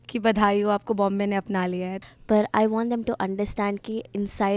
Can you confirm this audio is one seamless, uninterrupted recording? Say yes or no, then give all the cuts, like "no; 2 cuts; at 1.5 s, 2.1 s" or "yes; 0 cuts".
no; 1 cut; at 2.0 s